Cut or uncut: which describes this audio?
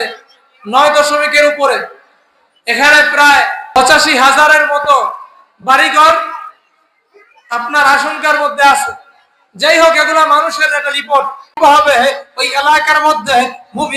cut